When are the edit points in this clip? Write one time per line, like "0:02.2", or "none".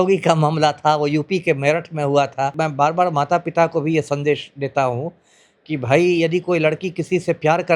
0:02.5